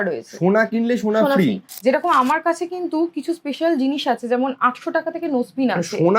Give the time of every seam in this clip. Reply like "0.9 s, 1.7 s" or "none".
1.7 s